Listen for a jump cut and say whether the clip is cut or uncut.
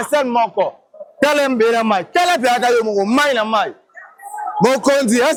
uncut